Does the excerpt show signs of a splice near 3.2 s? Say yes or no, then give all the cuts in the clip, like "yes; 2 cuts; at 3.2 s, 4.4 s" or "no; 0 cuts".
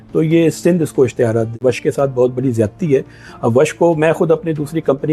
no; 1 cut; at 1.5 s